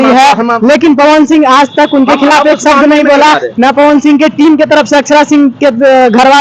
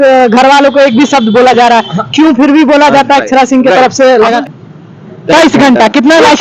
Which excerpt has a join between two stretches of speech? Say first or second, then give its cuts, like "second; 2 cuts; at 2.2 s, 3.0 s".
second; 1 cut; at 4.4 s